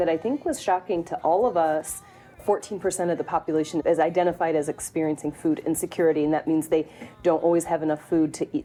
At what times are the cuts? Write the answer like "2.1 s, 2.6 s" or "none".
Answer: none